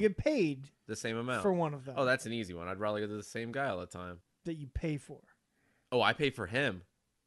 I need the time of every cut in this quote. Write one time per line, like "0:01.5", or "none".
0:04.2